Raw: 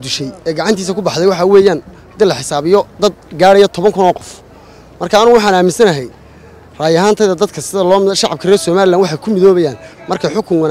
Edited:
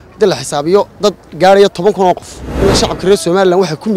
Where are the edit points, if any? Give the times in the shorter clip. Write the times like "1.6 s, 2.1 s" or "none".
2.6 s